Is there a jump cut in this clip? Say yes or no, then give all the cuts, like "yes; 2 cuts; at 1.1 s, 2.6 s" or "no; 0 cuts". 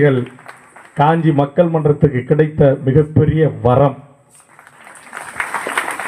no; 0 cuts